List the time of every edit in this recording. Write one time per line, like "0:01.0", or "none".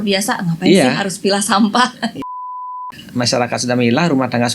0:02.4